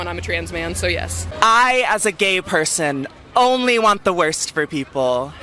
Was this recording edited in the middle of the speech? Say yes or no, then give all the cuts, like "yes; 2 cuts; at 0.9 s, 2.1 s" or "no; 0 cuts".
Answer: yes; 1 cut; at 1.2 s